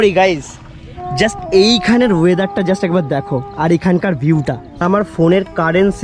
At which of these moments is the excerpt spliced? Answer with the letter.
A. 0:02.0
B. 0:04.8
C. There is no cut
B